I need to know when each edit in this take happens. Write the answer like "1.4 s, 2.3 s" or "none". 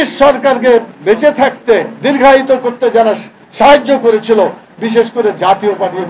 0.9 s